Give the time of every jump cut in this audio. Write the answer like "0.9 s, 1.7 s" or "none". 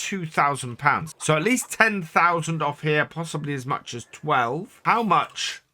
1.1 s, 4.7 s

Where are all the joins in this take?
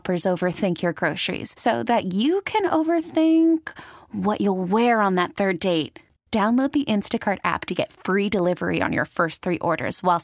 none

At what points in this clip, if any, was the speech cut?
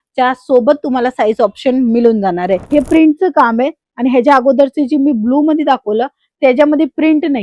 2.6 s

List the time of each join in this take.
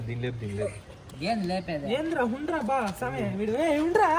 none

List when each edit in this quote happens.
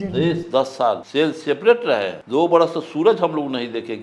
1.0 s, 2.2 s

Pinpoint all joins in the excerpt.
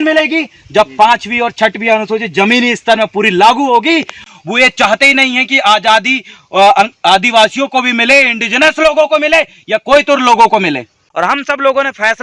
4.2 s, 11.1 s

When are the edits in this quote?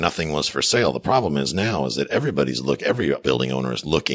3.2 s

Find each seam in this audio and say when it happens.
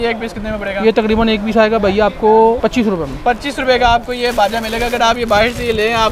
2.6 s

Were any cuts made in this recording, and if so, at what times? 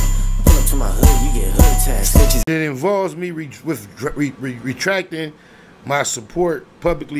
2.5 s

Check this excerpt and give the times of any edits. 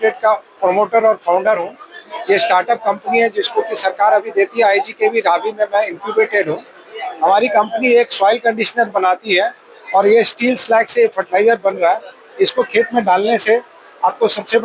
none

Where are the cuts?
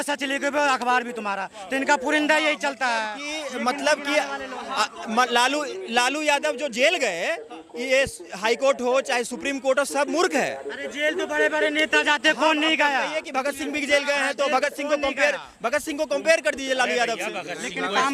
none

